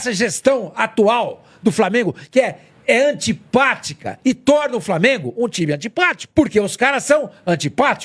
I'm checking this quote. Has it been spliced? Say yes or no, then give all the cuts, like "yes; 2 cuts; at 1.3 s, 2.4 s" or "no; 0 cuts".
no; 0 cuts